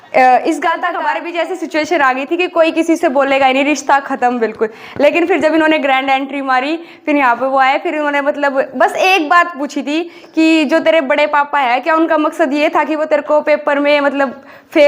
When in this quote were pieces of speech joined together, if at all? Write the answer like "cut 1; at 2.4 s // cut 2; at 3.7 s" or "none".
cut 1; at 0.9 s